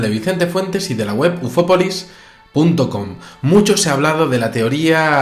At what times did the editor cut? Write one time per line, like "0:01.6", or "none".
none